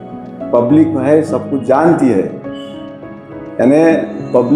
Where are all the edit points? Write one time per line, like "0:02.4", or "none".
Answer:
none